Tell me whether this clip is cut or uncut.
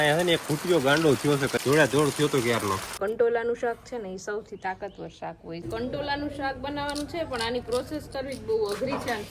cut